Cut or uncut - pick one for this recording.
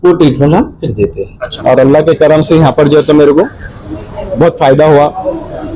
cut